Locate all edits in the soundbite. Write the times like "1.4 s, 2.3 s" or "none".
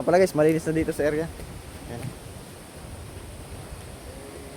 none